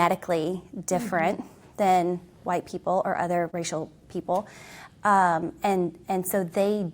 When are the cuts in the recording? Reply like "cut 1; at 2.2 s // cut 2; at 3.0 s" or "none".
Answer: cut 1; at 3.5 s